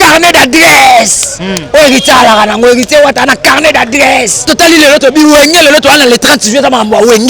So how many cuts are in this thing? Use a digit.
1